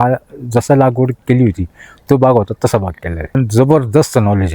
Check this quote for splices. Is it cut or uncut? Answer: cut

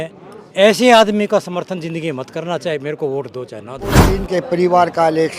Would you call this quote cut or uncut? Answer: cut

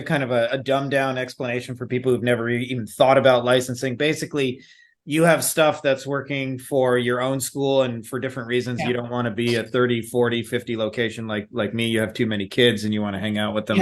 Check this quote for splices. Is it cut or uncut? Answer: uncut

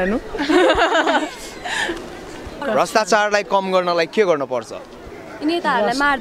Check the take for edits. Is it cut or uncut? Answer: cut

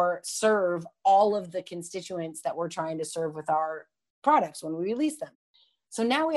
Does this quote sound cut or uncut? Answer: cut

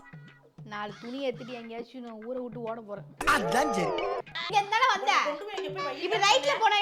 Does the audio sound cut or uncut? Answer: cut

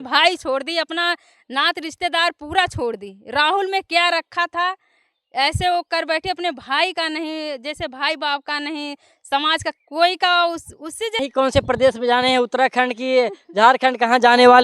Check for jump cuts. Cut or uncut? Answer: cut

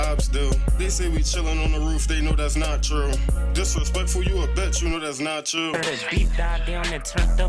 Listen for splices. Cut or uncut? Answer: cut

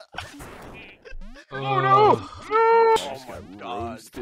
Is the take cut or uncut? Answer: cut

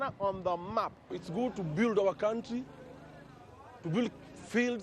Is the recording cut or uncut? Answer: cut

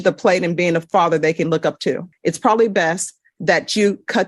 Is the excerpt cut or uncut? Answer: cut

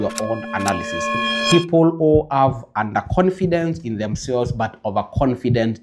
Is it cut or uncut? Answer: cut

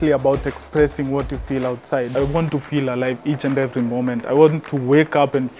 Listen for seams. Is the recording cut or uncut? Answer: cut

